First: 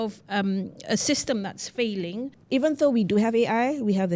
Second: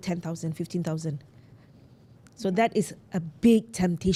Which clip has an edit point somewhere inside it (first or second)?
first